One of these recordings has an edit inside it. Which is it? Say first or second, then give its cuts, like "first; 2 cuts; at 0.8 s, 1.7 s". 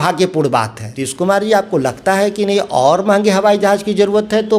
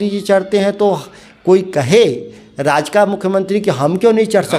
first; 1 cut; at 1.0 s